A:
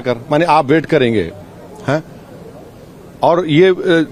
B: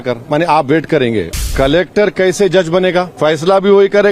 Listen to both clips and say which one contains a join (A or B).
B